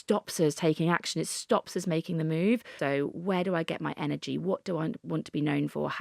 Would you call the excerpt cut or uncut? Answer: cut